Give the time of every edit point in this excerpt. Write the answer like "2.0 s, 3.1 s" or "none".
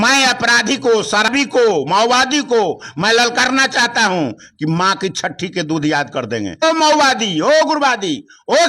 1.3 s, 6.6 s